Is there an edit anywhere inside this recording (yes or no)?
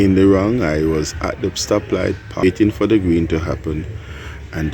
yes